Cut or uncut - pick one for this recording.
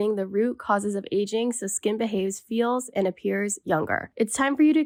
uncut